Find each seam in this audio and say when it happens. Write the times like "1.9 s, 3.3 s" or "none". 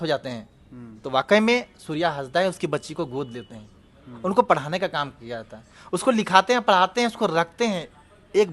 none